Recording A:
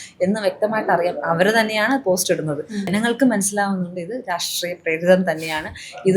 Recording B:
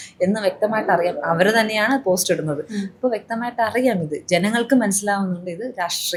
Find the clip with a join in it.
A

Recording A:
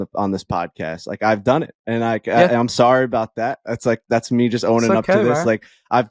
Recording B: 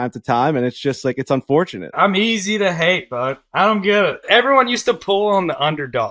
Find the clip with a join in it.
B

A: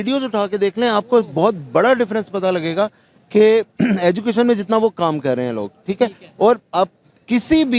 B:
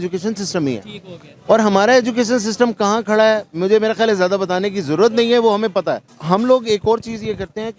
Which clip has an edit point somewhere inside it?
B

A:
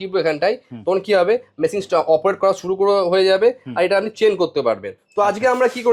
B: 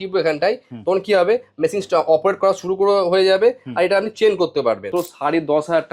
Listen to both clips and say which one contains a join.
B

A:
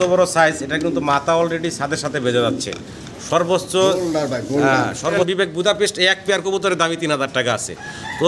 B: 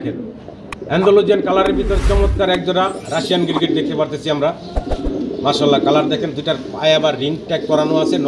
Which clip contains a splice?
A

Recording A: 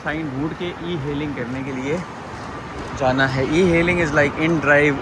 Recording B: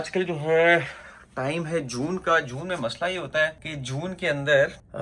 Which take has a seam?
B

